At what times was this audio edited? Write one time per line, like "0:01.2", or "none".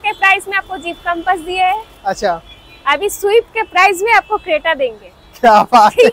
none